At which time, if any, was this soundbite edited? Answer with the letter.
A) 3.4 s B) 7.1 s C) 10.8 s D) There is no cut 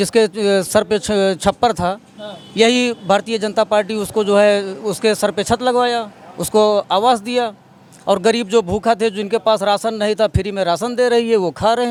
D